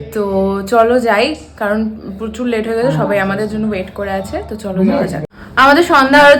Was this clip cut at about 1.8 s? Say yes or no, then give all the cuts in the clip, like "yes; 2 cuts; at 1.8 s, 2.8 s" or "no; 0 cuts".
no; 0 cuts